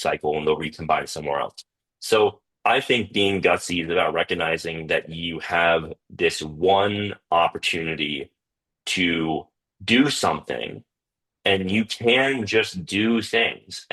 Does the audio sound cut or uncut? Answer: cut